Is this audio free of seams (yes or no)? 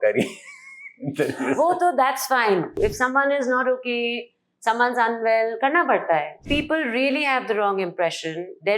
no